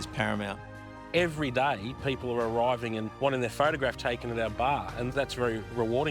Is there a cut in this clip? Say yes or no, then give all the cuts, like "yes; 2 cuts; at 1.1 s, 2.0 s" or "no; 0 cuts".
yes; 2 cuts; at 1.0 s, 5.1 s